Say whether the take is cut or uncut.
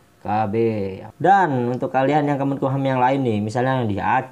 cut